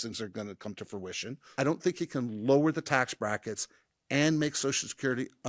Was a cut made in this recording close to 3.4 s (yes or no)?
no